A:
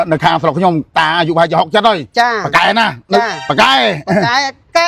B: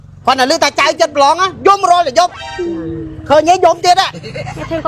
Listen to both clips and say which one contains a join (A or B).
A